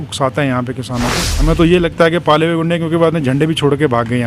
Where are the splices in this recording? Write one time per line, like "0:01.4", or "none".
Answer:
0:01.3